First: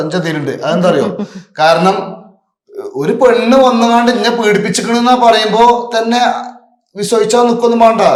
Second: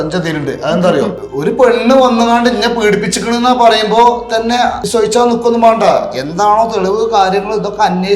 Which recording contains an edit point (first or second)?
second